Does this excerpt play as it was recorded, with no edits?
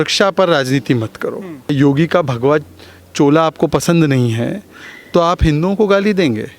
no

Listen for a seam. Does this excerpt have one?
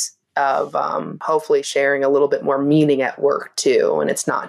yes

